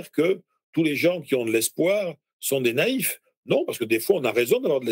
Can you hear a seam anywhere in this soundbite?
no; 0 cuts

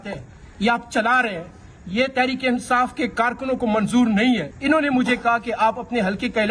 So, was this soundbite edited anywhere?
yes; 1 cut; at 4.5 s

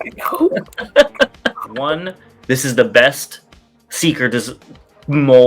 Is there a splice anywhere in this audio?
yes; 1 cut; at 1.9 s

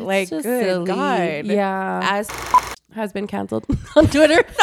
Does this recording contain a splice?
yes; 1 cut; at 2.3 s

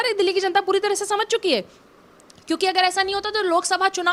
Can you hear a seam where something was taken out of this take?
no; 0 cuts

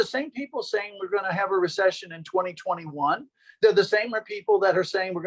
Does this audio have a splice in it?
no; 0 cuts

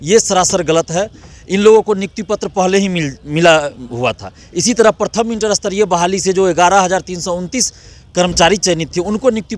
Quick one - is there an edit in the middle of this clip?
no; 0 cuts

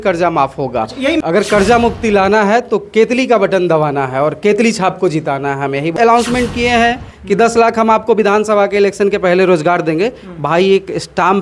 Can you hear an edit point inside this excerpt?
yes; 2 cuts; at 1.2 s, 6.0 s

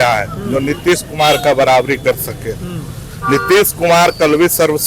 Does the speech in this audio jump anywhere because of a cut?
no; 0 cuts

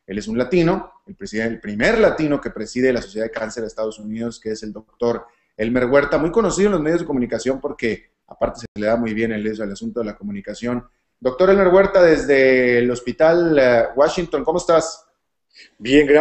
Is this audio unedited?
no; 1 cut; at 11.1 s

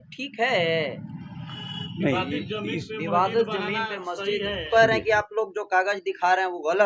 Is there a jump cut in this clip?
yes; 1 cut; at 4.7 s

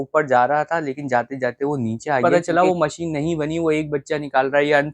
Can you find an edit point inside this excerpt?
yes; 1 cut; at 2.2 s

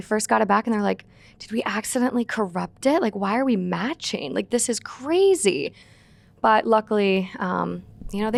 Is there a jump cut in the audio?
no; 0 cuts

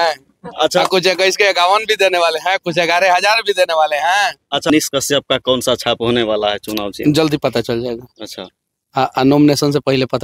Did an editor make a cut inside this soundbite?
yes; 1 cut; at 4.7 s

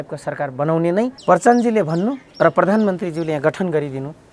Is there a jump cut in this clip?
yes; 2 cuts; at 1.2 s, 2.2 s

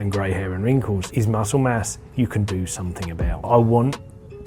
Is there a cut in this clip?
yes; 2 cuts; at 1.1 s, 3.5 s

